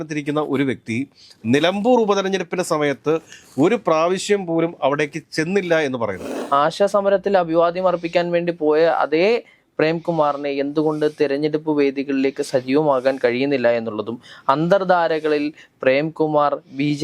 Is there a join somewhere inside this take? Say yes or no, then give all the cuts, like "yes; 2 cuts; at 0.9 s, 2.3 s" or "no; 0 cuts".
yes; 1 cut; at 6.3 s